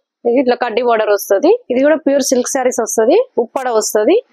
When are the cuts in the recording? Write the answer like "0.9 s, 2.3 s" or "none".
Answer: 1.6 s